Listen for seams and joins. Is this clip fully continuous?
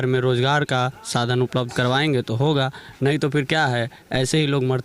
yes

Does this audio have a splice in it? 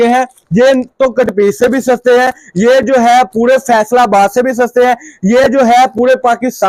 no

